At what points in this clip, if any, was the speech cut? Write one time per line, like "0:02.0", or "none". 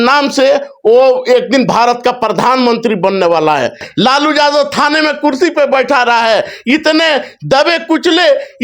0:03.9